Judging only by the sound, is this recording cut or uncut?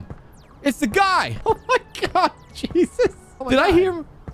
cut